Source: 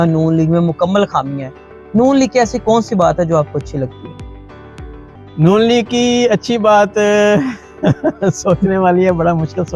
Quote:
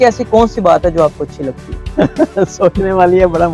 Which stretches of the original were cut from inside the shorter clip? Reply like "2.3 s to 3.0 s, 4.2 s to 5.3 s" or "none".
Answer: 4.1 s to 7.6 s